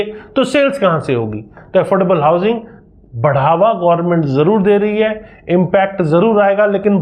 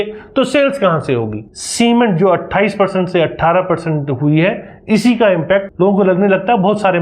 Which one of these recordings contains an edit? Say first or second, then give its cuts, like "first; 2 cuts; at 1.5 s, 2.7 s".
second; 2 cuts; at 1.5 s, 5.7 s